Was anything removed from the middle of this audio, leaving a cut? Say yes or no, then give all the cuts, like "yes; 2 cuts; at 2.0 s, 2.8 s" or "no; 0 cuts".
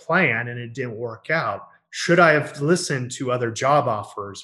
no; 0 cuts